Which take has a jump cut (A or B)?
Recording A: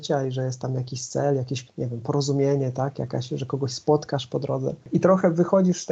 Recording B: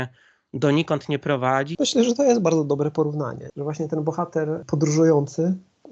B